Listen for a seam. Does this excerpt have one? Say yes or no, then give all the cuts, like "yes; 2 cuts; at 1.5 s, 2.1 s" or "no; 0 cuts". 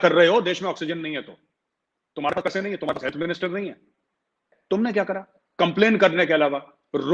yes; 1 cut; at 4.5 s